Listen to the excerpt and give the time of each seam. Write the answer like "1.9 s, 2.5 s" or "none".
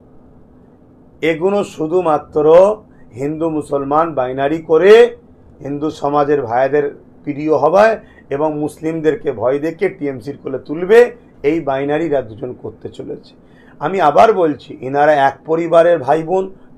none